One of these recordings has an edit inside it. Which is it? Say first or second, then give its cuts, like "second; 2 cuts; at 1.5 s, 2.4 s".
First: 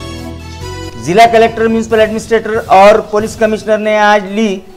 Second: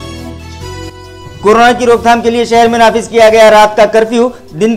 first; 1 cut; at 0.9 s